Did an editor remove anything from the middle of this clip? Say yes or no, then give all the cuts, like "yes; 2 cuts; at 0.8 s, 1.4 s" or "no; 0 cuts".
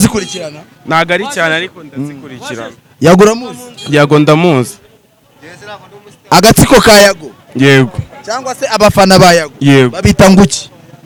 no; 0 cuts